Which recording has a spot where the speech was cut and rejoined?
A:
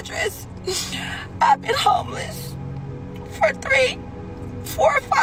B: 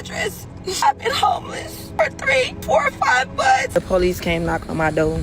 B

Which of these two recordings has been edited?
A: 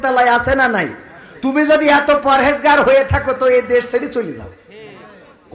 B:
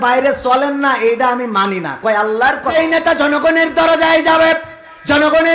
B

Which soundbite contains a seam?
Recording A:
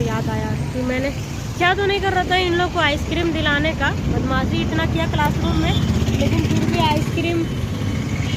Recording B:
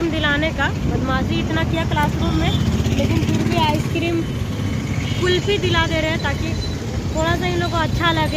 A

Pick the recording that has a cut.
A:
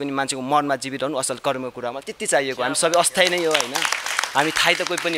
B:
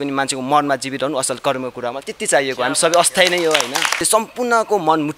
B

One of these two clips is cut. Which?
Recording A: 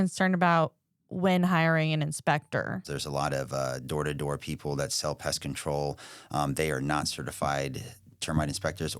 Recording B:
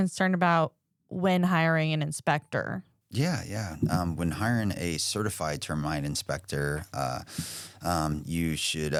A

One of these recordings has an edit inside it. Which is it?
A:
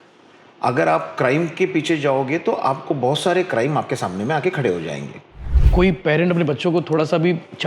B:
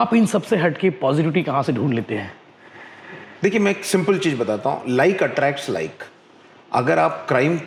A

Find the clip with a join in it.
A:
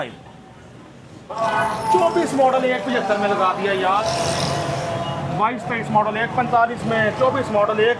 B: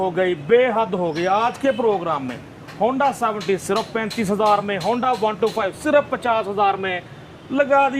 A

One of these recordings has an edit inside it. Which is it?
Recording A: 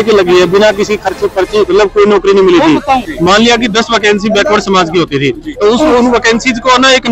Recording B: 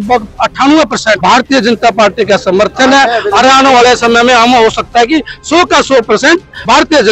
A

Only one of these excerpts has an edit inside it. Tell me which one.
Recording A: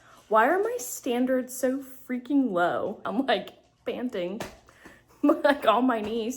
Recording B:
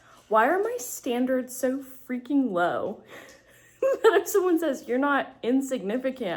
A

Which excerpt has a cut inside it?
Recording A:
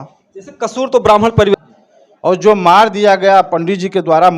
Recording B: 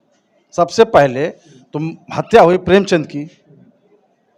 A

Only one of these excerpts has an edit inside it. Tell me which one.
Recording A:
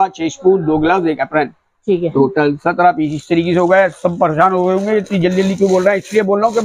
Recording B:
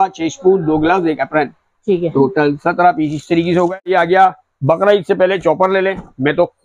B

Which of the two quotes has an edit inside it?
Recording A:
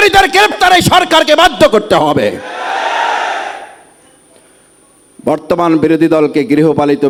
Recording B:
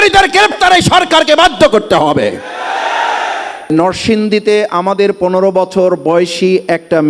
B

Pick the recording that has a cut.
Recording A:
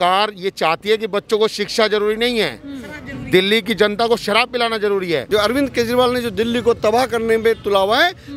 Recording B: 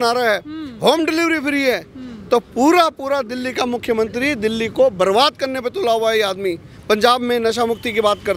A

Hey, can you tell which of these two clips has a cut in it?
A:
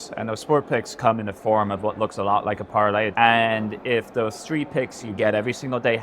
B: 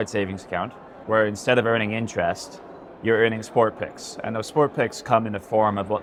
A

